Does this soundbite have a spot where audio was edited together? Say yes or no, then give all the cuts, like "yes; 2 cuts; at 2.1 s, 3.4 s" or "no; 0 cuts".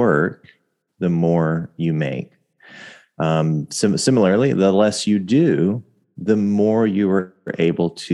no; 0 cuts